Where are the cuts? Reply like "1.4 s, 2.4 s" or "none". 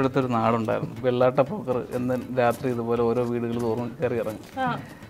0.9 s